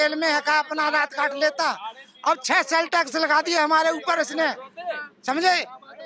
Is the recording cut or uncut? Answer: uncut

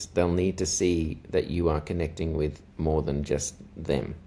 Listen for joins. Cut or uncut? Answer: cut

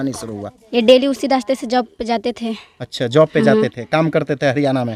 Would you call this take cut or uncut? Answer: uncut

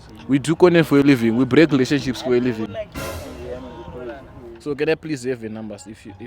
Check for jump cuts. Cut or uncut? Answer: cut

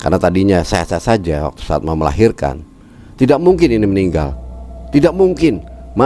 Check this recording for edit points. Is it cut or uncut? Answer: uncut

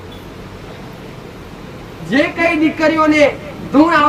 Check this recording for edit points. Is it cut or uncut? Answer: uncut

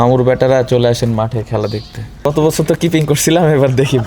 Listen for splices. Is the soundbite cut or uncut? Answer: cut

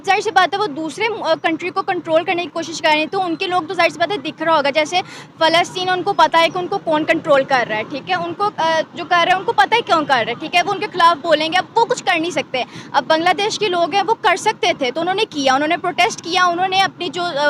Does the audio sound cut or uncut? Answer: uncut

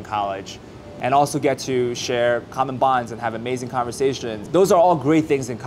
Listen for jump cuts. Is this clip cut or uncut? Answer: cut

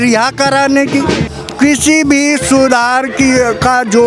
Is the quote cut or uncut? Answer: cut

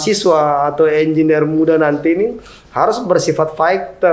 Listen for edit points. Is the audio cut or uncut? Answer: uncut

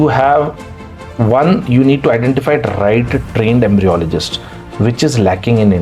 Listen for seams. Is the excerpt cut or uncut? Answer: uncut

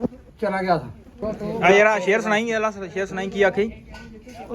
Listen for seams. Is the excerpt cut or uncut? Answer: cut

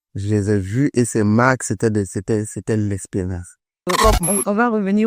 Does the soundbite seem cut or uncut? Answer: cut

